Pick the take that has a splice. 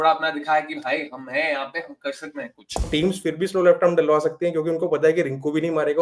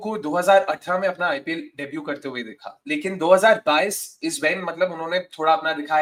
first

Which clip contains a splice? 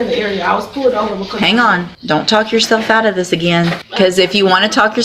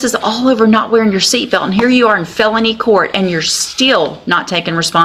first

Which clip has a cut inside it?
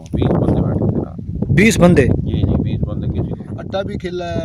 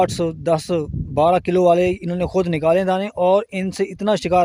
first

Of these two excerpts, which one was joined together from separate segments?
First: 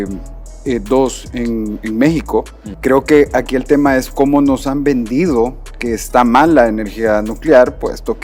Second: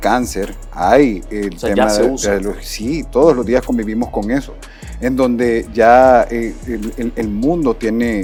first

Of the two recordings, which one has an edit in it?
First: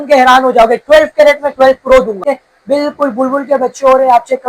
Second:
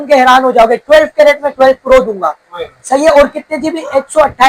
first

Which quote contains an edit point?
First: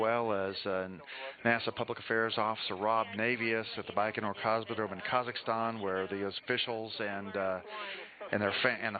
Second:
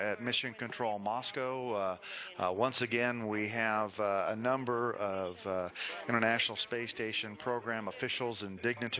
first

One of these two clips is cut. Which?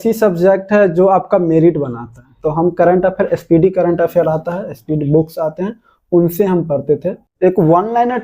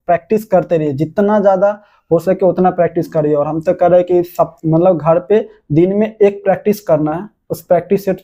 first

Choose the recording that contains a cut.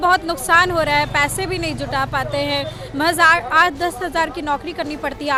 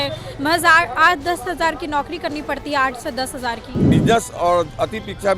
second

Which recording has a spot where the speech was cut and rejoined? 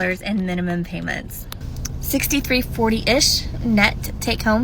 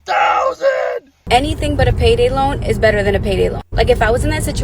second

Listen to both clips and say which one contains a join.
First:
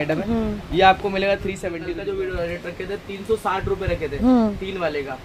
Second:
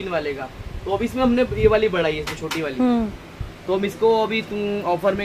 first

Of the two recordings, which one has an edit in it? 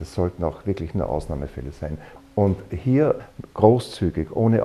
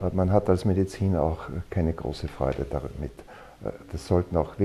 first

